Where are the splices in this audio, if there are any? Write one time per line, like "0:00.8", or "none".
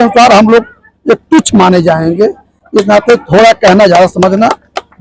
none